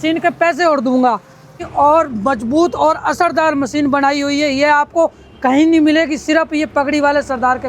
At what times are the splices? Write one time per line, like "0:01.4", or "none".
0:01.6